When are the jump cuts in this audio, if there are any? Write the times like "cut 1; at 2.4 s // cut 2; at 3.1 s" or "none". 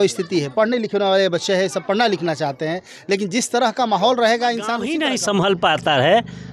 cut 1; at 4.9 s